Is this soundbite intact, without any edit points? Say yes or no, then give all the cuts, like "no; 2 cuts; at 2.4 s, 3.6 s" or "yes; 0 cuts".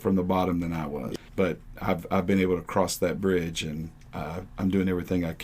no; 1 cut; at 1.1 s